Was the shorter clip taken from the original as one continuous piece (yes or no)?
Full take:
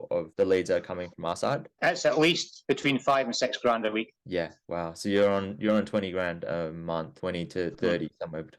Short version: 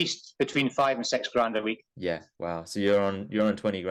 yes